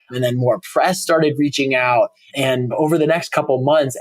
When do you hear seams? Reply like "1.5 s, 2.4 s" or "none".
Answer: 2.4 s